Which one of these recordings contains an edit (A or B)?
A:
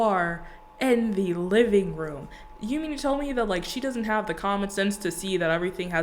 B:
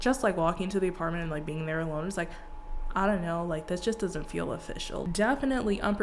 B